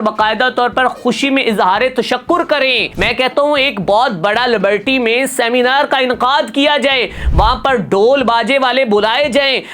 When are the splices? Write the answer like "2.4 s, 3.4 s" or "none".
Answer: 2.9 s